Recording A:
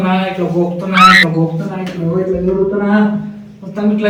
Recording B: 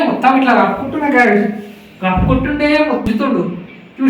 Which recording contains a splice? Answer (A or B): B